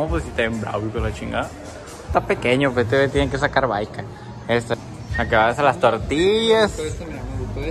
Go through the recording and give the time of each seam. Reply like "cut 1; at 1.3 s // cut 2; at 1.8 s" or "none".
cut 1; at 2.1 s // cut 2; at 4.7 s